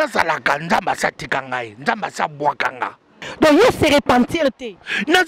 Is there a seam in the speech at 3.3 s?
yes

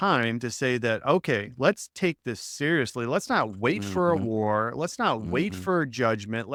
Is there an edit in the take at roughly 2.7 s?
no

